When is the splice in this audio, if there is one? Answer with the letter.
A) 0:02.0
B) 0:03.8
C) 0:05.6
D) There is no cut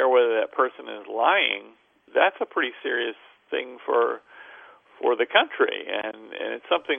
A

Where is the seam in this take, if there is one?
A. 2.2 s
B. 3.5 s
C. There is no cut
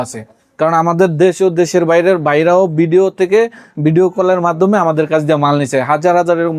C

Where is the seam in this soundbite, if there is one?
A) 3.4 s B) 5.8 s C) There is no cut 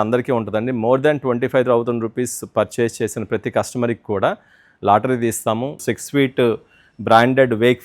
B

